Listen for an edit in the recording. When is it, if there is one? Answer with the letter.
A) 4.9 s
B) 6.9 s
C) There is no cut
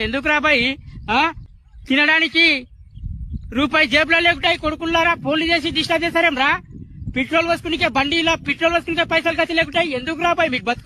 C